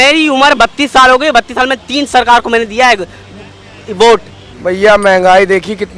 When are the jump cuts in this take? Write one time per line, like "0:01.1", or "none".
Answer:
0:04.5